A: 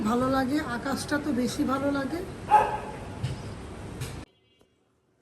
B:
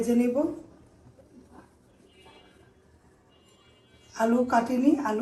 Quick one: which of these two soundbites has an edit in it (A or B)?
A